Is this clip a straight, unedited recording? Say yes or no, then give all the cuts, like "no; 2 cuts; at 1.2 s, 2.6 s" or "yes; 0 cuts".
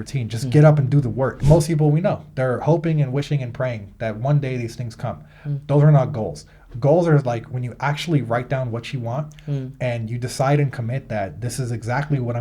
no; 1 cut; at 1.4 s